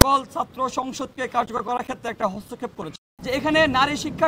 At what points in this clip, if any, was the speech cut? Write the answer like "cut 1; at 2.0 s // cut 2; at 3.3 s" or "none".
cut 1; at 3.1 s